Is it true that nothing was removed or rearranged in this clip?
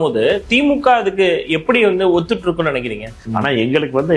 no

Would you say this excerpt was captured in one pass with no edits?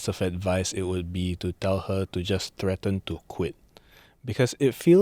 yes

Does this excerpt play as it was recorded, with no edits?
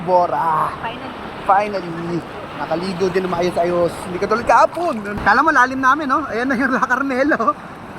no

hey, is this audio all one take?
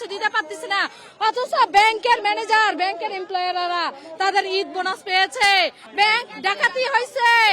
no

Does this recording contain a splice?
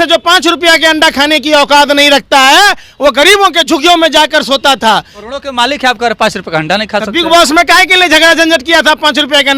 yes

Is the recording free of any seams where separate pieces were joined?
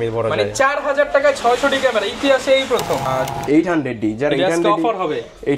no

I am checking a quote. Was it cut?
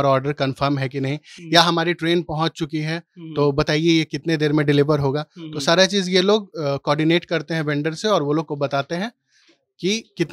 no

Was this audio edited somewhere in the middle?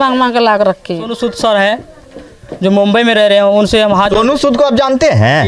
yes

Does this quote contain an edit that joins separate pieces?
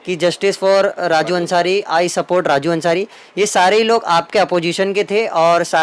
no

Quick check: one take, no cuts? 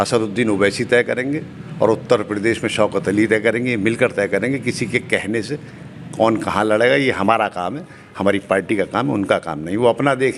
yes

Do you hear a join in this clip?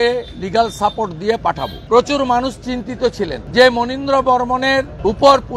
yes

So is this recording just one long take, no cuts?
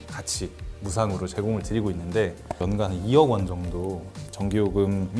yes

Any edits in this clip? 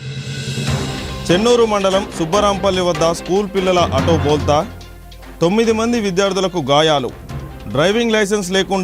no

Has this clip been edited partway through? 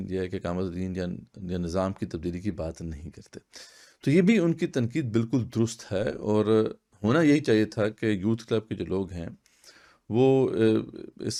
no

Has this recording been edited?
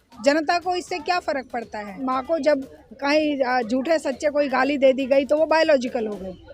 yes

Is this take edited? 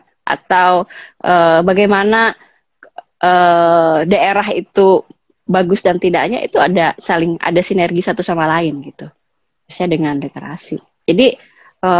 no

